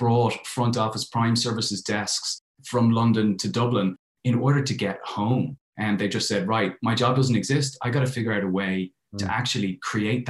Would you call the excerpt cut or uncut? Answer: uncut